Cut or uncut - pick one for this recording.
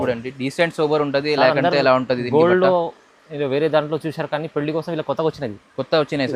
uncut